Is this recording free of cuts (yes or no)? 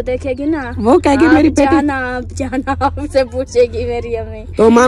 yes